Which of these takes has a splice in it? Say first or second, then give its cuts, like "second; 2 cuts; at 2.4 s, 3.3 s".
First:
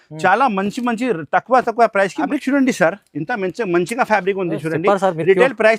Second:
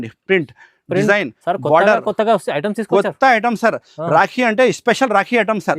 first; 1 cut; at 2.3 s